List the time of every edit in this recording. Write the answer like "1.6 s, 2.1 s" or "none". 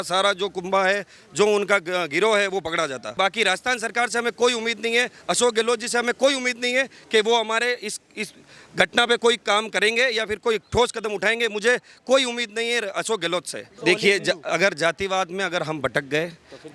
3.1 s, 13.8 s

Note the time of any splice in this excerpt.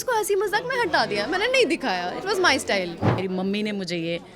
3.2 s

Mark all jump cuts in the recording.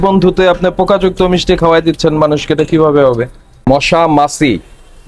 3.5 s

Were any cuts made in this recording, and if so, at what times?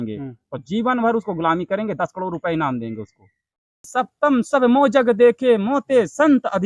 3.8 s

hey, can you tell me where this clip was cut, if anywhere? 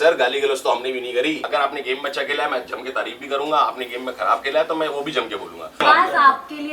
1.4 s, 5.8 s

